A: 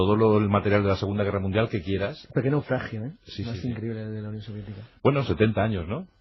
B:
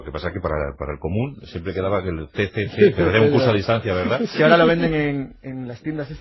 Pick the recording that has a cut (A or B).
A